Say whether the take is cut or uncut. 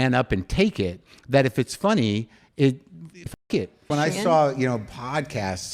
cut